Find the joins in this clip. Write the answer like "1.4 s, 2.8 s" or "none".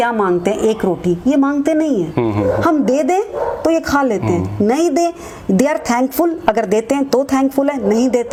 none

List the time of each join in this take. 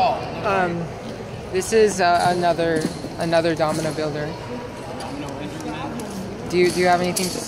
none

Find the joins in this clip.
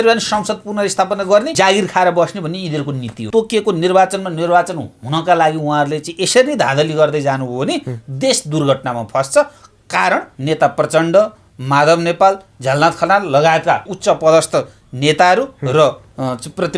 1.5 s, 3.2 s, 10.3 s, 13.9 s

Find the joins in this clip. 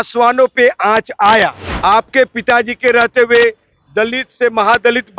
1.7 s

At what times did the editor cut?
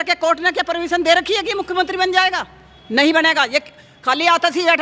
none

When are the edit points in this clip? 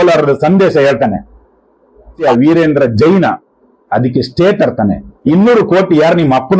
2.2 s, 5.1 s

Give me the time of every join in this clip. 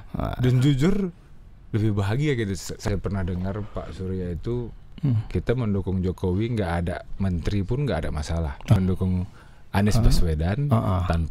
2.8 s, 8.8 s

